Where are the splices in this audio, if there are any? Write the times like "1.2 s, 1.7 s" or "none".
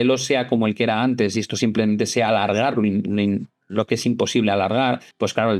none